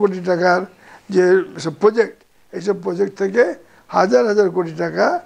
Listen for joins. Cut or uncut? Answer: uncut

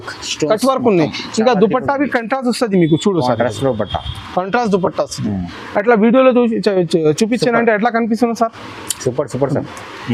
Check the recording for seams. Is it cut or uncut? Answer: uncut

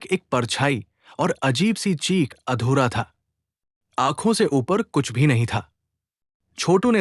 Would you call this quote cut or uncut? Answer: cut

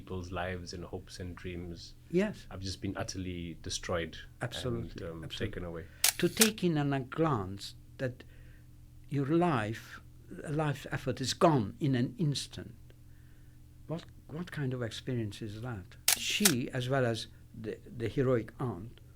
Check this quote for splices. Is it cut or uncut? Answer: cut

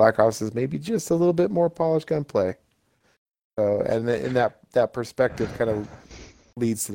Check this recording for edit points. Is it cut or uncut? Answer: uncut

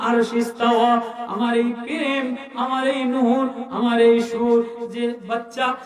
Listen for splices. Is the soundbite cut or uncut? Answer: uncut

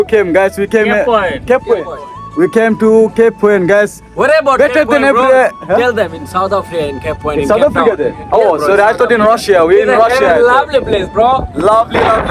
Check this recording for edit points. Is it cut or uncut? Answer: uncut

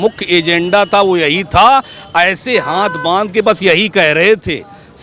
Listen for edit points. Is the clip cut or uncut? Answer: uncut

